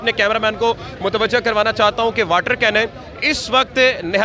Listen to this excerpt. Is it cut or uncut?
uncut